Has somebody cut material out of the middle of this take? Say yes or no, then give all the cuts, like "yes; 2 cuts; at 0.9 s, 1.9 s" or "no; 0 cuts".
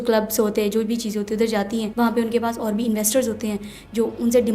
yes; 1 cut; at 1.9 s